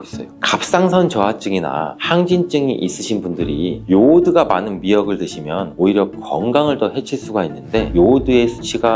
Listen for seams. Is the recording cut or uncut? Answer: cut